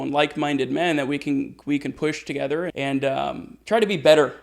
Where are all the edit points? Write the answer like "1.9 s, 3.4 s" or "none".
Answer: 2.7 s